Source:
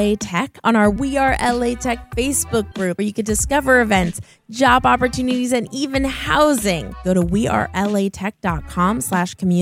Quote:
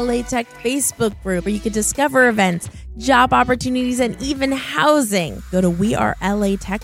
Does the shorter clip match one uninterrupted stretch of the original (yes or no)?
yes